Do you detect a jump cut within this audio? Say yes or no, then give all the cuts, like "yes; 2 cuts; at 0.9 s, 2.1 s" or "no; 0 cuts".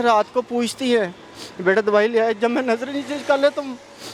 no; 0 cuts